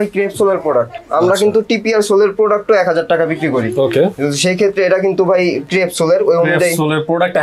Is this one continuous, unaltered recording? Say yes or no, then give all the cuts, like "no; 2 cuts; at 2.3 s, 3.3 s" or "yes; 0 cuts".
yes; 0 cuts